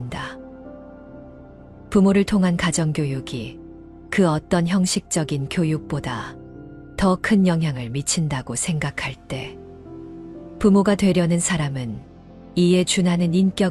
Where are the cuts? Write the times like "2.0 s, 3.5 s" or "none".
9.4 s, 10.6 s